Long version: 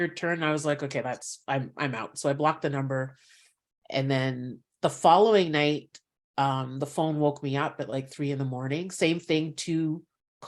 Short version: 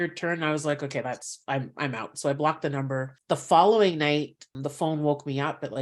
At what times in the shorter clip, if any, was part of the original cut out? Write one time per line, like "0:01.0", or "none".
0:03.1
0:04.6